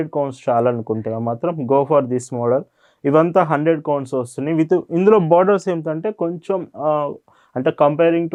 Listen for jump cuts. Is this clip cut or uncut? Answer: uncut